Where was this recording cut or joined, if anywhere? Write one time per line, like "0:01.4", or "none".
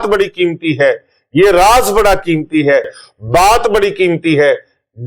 0:03.0